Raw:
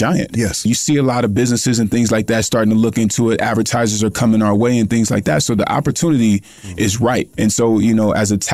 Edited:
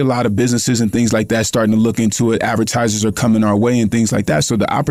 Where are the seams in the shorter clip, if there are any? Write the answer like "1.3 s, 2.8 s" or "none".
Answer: none